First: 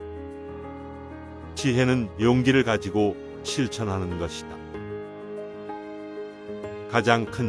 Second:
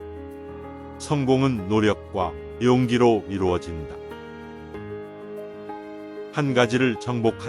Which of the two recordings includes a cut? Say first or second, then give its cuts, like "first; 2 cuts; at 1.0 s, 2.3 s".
second; 3 cuts; at 1.1 s, 4.3 s, 6.3 s